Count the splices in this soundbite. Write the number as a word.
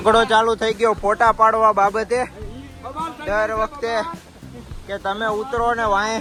zero